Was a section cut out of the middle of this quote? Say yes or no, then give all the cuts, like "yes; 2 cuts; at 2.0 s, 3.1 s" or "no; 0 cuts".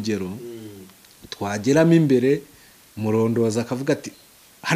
no; 0 cuts